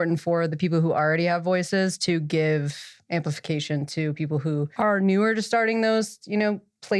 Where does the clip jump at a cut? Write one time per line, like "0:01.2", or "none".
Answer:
0:04.7